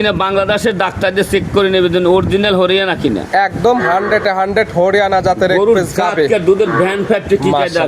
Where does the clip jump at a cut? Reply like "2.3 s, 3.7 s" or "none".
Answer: none